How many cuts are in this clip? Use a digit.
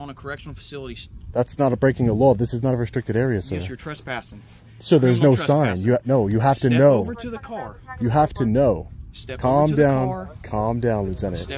0